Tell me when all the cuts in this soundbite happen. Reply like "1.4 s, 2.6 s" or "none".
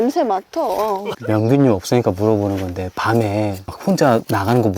1.1 s